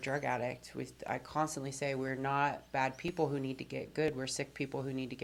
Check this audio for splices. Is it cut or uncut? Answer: uncut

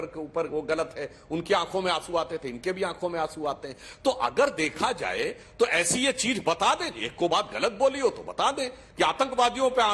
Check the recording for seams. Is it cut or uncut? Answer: uncut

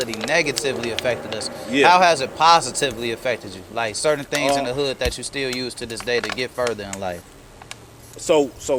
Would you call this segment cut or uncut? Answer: uncut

